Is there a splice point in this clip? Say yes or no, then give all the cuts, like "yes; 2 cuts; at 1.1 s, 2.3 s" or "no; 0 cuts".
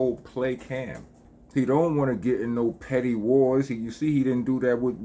yes; 1 cut; at 1.3 s